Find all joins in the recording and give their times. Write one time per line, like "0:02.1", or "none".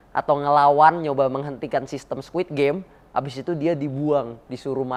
none